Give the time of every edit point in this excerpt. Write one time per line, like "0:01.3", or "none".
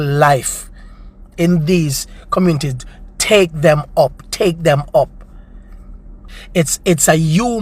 0:06.3